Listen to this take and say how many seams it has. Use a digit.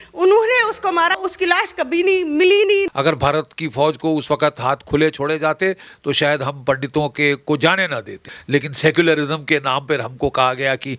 3